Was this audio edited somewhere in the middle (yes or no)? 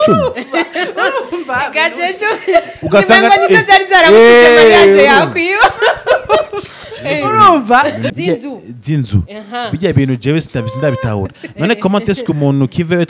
yes